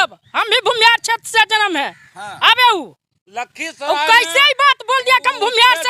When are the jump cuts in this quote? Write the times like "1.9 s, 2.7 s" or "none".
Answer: none